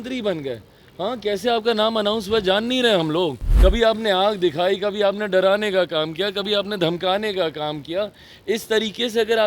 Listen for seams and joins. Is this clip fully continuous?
no; 1 cut; at 3.4 s

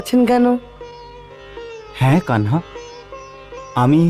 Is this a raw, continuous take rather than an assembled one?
yes; 0 cuts

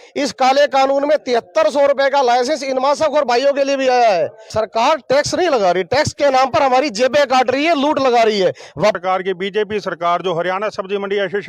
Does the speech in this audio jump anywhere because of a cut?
yes; 2 cuts; at 4.4 s, 9.0 s

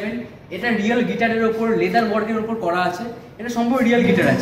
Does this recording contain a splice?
no; 0 cuts

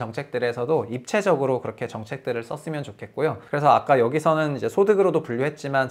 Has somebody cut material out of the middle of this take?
yes; 1 cut; at 3.4 s

